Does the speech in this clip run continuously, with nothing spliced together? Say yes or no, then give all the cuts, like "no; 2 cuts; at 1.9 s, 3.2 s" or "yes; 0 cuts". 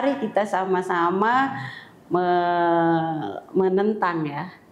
yes; 0 cuts